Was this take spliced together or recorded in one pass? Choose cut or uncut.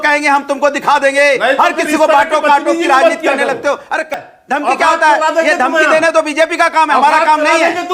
cut